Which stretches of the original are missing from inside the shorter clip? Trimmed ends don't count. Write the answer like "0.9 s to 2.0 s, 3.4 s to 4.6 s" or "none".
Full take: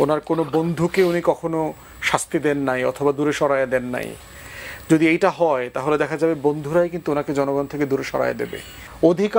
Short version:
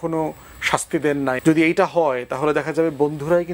2.8 s to 4.8 s